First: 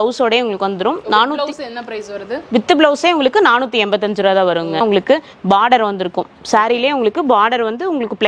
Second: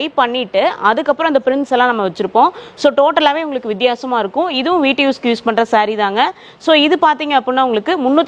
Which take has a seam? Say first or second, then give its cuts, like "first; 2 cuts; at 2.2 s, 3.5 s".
first; 1 cut; at 4.8 s